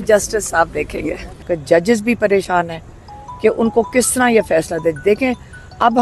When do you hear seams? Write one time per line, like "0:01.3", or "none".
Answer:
0:01.4